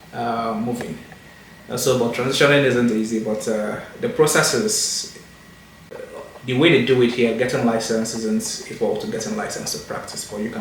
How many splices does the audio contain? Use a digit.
1